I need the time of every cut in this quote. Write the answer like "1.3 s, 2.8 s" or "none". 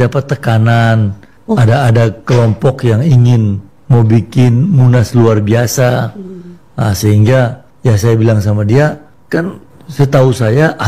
none